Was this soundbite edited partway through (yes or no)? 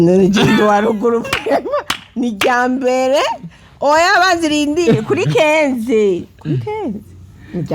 no